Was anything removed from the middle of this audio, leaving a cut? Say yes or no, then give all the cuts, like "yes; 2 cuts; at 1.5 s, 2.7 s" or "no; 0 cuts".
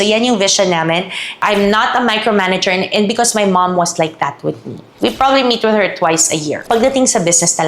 yes; 3 cuts; at 1.4 s, 4.9 s, 6.6 s